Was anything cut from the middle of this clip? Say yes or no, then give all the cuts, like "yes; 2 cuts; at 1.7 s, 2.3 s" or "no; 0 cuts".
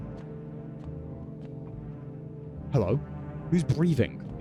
no; 0 cuts